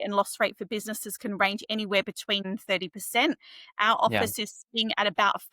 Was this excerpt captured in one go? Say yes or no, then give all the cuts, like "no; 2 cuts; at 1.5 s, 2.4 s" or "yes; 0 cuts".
no; 1 cut; at 2.4 s